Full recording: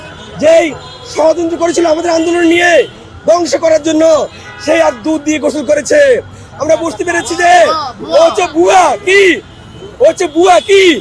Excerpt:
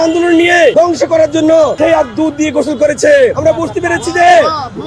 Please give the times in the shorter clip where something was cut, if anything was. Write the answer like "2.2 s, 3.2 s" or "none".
0.7 s, 1.7 s, 3.4 s